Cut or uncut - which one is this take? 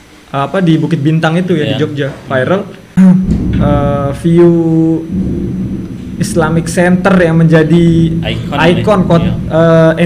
cut